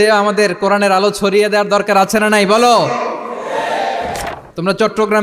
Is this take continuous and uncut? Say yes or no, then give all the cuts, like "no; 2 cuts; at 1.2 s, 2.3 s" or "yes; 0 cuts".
no; 1 cut; at 4.2 s